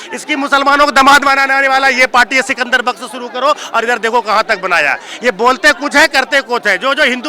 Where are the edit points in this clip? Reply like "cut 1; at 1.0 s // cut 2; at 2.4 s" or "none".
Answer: none